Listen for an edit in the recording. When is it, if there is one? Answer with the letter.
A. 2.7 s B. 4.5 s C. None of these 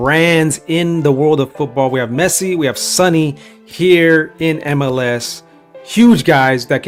C